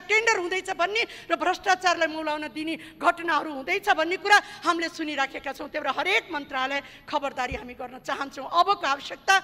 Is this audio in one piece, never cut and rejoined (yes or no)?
yes